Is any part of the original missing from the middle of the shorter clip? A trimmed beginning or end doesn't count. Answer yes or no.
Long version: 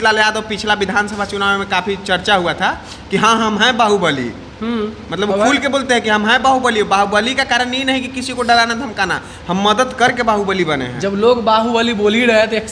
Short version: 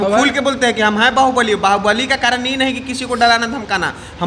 no